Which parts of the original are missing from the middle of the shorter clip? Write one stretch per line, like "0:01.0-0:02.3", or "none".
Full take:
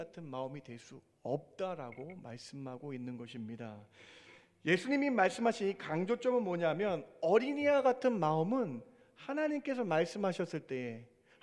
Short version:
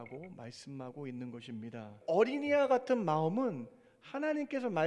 0:03.8-0:07.1